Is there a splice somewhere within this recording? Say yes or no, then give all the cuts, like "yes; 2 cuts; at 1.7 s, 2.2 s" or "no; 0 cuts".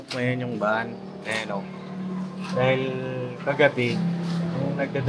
no; 0 cuts